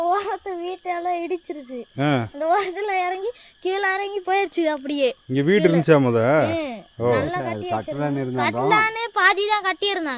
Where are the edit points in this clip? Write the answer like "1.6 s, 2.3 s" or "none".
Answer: none